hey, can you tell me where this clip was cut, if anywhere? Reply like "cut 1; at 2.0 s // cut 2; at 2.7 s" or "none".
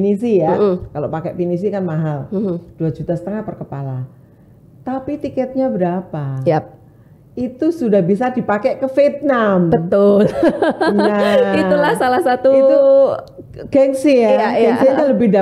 none